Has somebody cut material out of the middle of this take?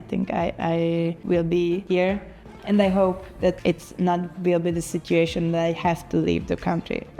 yes; 3 cuts; at 1.2 s, 2.2 s, 3.6 s

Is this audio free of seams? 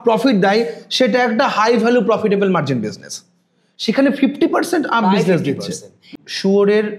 no; 1 cut; at 6.1 s

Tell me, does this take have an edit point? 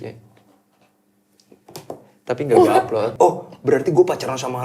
yes; 1 cut; at 3.1 s

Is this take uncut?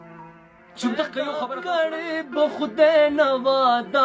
no; 1 cut; at 1.5 s

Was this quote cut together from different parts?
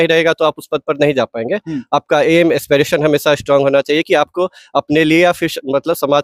no; 0 cuts

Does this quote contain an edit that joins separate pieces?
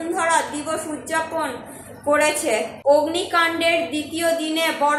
yes; 1 cut; at 2.7 s

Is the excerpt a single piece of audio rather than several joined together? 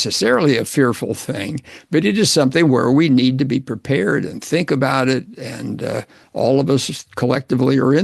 yes; 0 cuts

